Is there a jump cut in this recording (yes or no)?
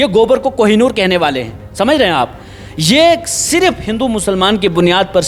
no